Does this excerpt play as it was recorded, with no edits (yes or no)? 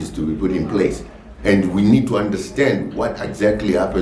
yes